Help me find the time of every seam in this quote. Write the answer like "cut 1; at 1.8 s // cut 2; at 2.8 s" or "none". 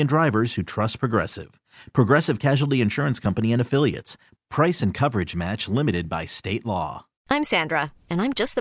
cut 1; at 7.1 s